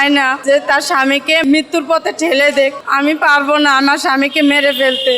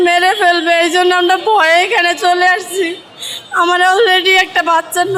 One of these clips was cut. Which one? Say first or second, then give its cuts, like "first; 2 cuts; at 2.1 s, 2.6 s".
first; 1 cut; at 1.4 s